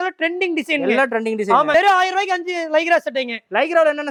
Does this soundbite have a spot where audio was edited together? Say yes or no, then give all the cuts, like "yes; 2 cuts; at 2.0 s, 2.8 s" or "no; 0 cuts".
no; 0 cuts